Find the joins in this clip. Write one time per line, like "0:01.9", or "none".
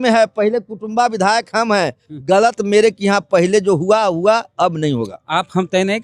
none